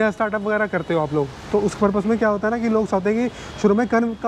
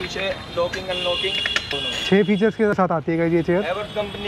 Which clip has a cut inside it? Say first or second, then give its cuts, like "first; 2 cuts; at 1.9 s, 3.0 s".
second; 2 cuts; at 1.8 s, 2.8 s